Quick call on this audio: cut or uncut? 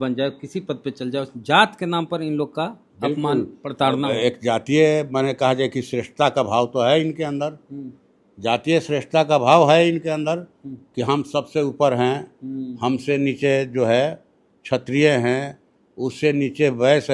uncut